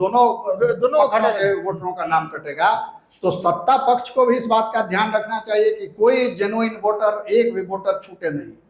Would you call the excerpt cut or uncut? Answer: uncut